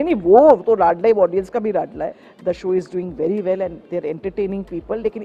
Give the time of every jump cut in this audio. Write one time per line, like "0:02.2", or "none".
0:02.3